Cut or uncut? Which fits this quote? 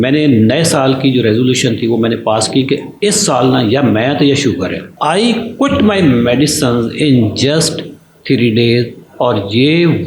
cut